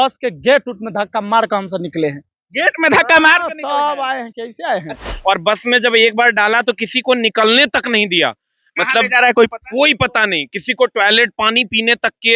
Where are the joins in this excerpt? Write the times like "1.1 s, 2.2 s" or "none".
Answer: 5.0 s